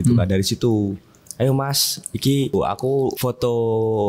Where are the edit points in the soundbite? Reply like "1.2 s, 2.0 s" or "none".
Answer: 2.9 s